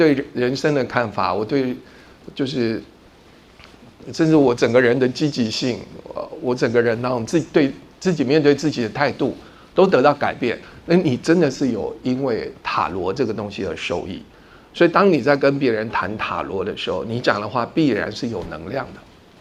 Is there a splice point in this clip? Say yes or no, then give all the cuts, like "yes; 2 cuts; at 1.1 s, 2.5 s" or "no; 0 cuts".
no; 0 cuts